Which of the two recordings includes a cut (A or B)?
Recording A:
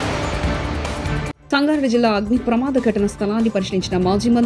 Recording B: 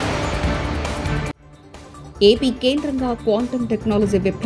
A